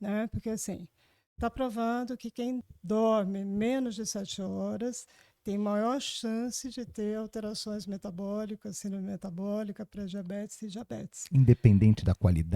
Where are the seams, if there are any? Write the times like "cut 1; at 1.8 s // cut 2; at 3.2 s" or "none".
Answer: cut 1; at 2.7 s